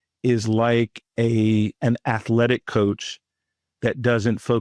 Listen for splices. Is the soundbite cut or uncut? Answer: cut